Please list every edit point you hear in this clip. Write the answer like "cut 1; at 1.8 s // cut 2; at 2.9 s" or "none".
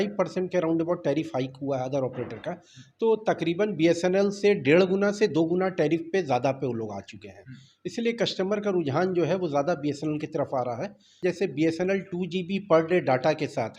cut 1; at 11.1 s